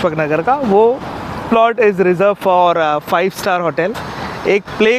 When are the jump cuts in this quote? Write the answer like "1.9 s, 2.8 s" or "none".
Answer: 1.4 s, 4.0 s

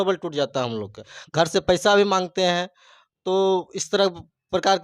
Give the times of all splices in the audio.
1.1 s

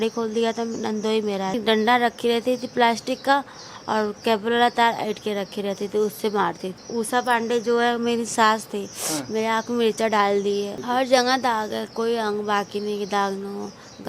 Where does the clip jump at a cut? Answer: 1.6 s, 6.8 s, 10.8 s

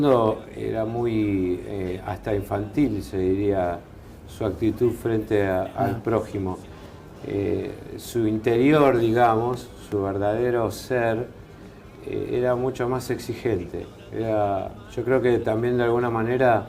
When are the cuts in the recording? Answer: 3.2 s

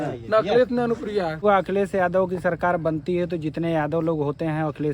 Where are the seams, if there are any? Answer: 1.4 s

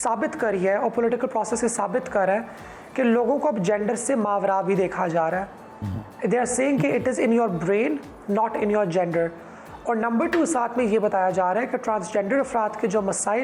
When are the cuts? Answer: none

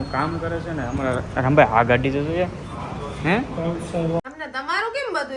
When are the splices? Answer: 4.2 s

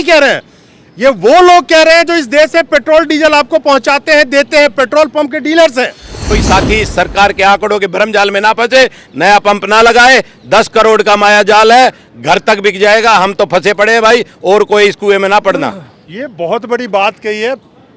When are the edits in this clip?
6.4 s

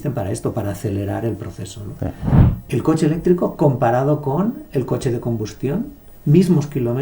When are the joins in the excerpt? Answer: 2.3 s

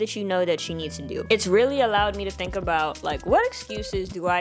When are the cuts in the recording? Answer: 1.2 s

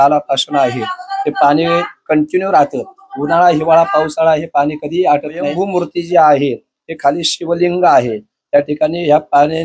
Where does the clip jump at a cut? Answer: 5.5 s

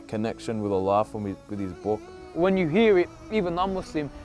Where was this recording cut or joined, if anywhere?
2.2 s

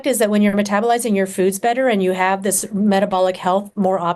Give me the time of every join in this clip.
none

